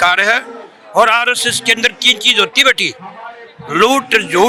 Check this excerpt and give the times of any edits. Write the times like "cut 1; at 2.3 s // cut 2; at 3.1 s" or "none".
none